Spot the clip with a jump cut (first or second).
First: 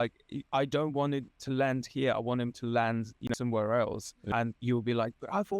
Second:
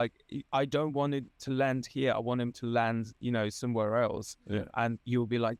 first